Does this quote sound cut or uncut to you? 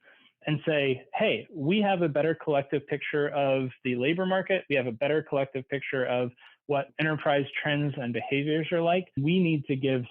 cut